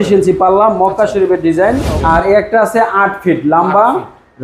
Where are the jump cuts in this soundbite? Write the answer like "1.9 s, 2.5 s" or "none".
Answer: 1.9 s